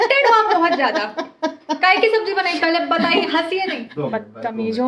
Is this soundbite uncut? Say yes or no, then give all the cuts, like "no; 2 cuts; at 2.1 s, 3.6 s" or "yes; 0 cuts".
no; 1 cut; at 3.8 s